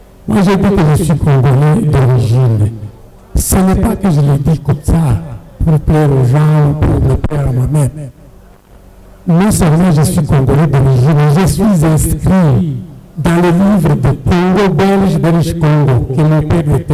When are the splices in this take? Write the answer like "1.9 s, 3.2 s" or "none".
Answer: none